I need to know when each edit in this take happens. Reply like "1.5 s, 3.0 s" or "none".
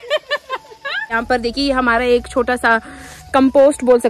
1.1 s

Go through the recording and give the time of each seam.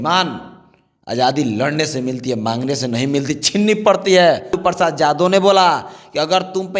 4.6 s

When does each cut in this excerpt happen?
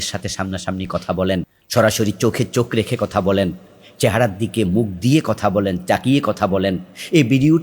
1.6 s

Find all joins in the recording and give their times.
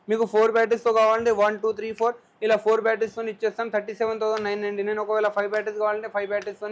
none

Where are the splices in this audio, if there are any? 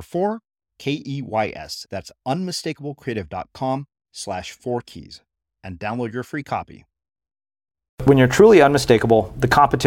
8.0 s

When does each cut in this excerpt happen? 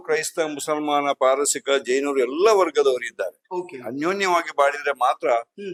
none

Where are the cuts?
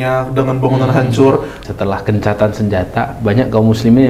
1.6 s

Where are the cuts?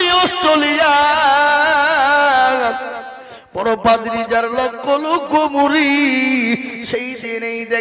none

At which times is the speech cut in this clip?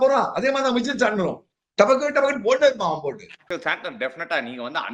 3.3 s

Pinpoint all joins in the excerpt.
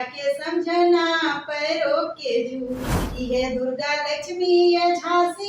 3.0 s

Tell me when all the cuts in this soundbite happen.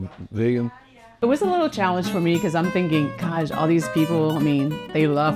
1.1 s

